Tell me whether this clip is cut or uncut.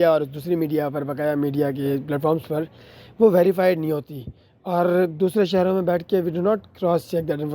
uncut